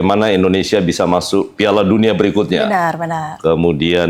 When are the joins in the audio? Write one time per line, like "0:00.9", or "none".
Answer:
none